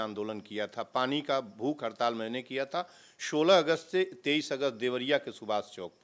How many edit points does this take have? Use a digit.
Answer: 0